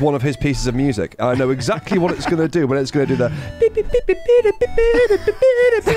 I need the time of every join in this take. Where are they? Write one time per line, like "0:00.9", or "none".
0:01.2